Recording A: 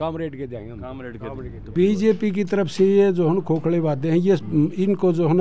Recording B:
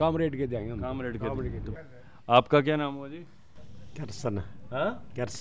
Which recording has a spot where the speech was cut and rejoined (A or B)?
A